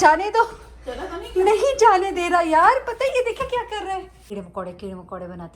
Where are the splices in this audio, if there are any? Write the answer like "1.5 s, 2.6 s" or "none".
4.3 s